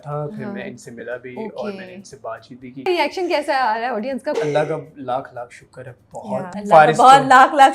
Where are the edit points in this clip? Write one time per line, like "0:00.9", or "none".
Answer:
0:02.8
0:04.3
0:06.6